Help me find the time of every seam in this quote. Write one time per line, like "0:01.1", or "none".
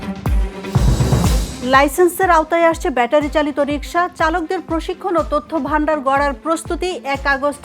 0:01.5